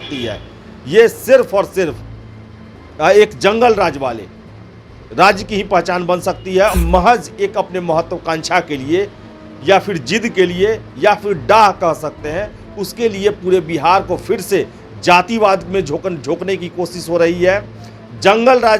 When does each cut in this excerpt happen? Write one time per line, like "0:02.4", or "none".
0:06.7